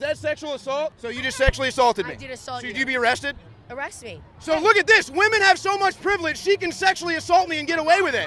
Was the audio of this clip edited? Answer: yes; 2 cuts; at 1.0 s, 4.4 s

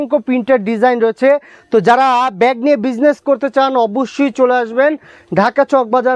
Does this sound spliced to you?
no; 0 cuts

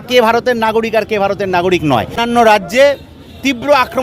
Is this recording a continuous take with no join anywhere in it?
no; 1 cut; at 2.2 s

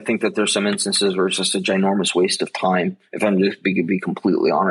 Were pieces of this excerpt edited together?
no; 0 cuts

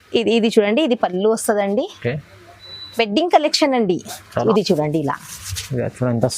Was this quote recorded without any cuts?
no; 1 cut; at 4.4 s

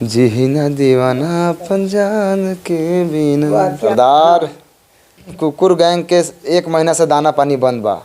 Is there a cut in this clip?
yes; 2 cuts; at 3.9 s, 5.3 s

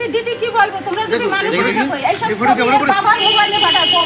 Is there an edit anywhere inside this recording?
no; 0 cuts

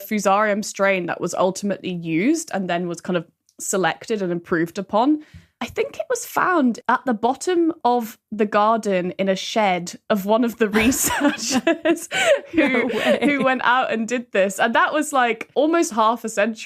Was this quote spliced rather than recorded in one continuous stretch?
yes; 2 cuts; at 6.8 s, 15.5 s

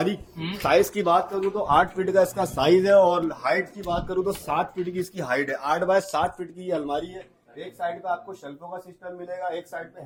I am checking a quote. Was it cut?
no; 0 cuts

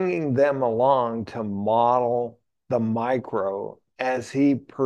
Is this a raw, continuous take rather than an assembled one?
yes; 0 cuts

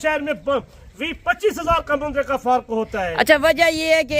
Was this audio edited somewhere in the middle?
no; 0 cuts

